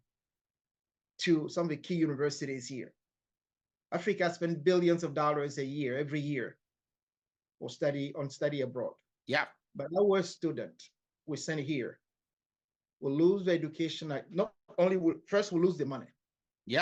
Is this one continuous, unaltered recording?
yes; 0 cuts

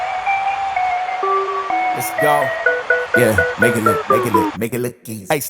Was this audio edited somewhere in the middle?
no; 0 cuts

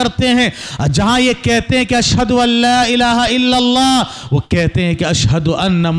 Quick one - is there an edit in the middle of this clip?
no; 0 cuts

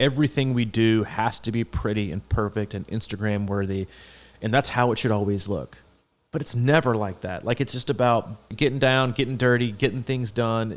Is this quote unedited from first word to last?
no; 1 cut; at 8.5 s

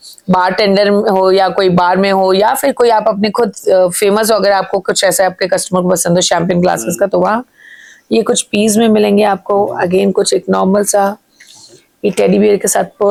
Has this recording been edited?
no; 0 cuts

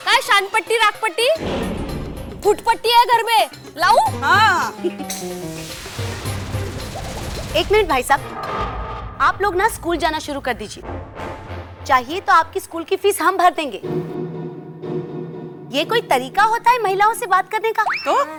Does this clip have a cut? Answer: no; 0 cuts

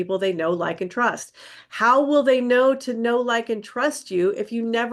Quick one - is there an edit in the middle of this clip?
no; 0 cuts

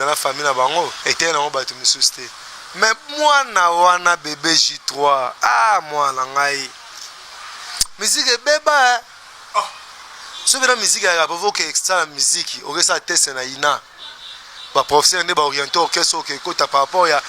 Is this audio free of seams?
no; 1 cut; at 1.0 s

